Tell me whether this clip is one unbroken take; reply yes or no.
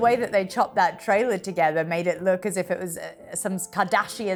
yes